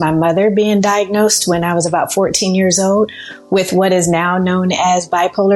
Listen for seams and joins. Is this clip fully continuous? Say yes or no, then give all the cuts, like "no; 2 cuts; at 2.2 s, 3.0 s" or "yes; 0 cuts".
yes; 0 cuts